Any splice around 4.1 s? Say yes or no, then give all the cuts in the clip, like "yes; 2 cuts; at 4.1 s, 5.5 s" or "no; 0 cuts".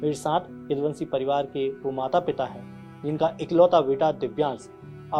no; 0 cuts